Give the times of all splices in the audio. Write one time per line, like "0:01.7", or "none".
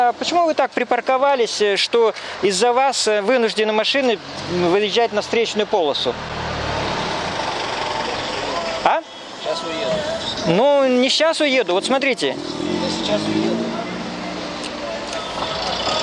none